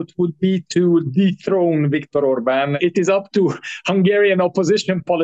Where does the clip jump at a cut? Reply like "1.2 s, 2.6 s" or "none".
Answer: 2.8 s